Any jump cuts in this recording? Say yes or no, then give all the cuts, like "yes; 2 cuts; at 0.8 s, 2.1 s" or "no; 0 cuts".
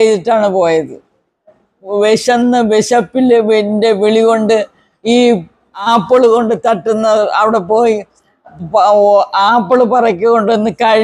yes; 2 cuts; at 1.8 s, 5.9 s